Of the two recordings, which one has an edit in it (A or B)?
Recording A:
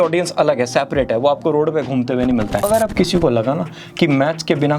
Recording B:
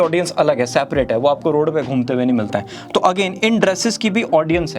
A